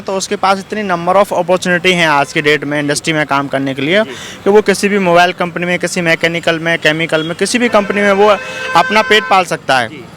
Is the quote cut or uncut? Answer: uncut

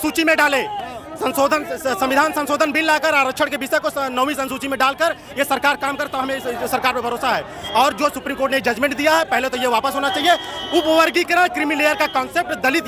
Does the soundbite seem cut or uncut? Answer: uncut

